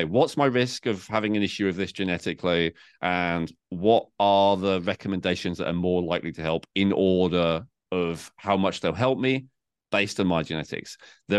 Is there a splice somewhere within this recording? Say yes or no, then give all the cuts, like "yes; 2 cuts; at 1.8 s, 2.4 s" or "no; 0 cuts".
no; 0 cuts